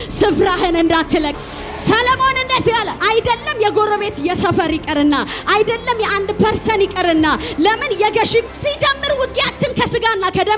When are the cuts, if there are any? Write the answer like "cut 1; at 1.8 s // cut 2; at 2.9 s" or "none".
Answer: cut 1; at 1.4 s // cut 2; at 2.9 s // cut 3; at 8.5 s